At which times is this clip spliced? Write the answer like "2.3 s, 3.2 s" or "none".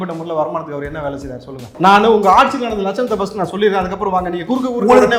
1.6 s